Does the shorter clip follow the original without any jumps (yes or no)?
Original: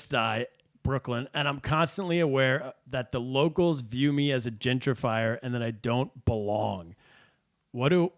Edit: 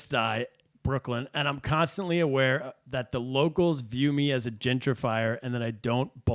yes